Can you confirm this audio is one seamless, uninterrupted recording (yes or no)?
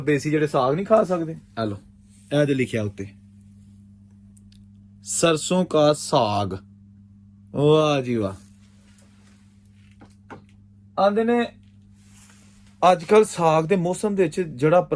yes